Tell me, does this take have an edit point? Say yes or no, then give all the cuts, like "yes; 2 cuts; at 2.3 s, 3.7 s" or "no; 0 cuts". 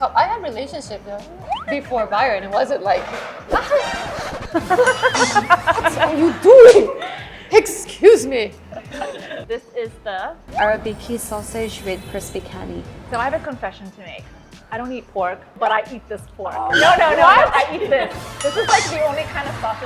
yes; 2 cuts; at 1.4 s, 9.3 s